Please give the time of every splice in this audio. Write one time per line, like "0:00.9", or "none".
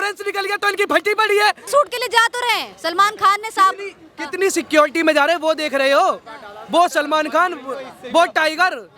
0:01.6